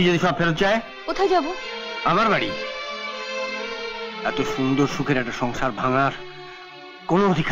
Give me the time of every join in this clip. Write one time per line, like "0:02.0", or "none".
0:01.0

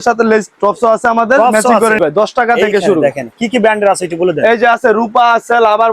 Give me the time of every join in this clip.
0:02.0

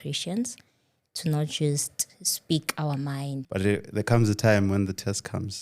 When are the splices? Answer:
0:03.4

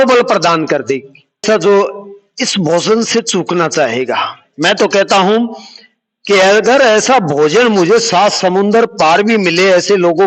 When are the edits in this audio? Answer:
0:01.4

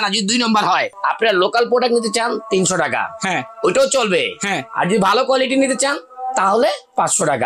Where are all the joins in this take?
0:00.9

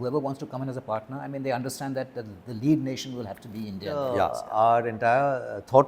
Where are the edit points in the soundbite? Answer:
0:04.2

